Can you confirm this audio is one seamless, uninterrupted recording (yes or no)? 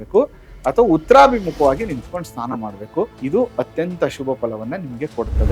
no